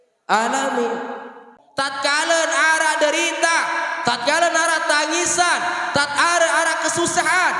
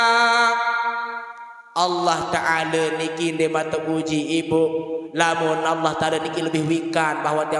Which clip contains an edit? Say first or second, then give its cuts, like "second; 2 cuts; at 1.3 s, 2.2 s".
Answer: first; 1 cut; at 1.4 s